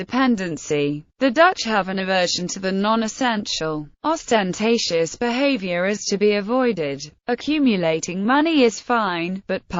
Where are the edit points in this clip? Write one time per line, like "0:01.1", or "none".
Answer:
0:02.5